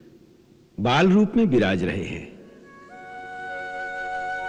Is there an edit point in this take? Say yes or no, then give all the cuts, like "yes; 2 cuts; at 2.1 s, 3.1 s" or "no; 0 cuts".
no; 0 cuts